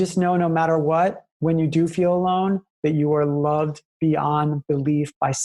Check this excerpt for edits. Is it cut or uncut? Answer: cut